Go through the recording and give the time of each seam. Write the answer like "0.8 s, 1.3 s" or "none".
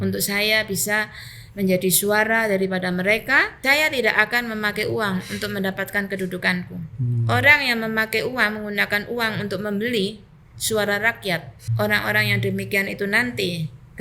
3.5 s, 11.6 s